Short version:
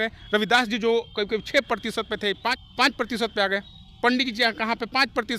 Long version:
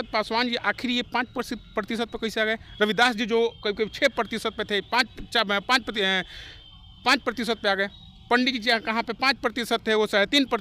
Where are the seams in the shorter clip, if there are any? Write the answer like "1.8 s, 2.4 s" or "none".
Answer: 2.6 s